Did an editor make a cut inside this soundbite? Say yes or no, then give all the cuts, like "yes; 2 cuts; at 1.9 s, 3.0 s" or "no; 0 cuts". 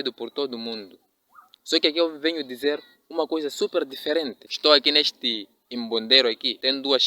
yes; 1 cut; at 4.5 s